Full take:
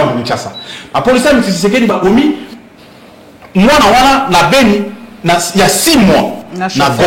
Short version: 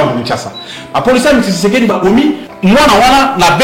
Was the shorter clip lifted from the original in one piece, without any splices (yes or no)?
no